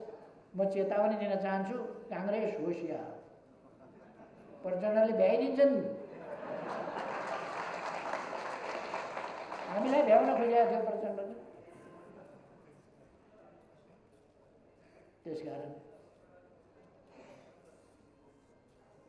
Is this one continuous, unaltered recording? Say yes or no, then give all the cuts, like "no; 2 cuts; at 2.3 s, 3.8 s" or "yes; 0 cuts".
yes; 0 cuts